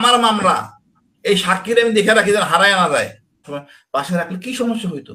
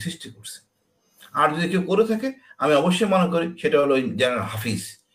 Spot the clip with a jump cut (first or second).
first